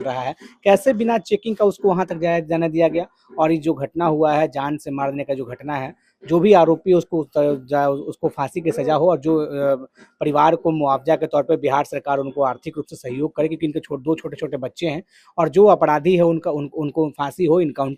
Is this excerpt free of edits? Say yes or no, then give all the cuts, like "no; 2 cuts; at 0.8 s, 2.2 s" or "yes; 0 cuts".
yes; 0 cuts